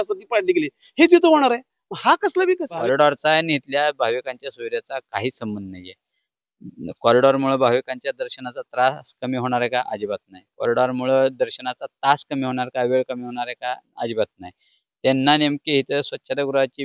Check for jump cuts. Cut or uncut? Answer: cut